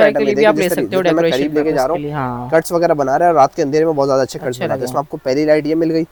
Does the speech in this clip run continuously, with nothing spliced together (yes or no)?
yes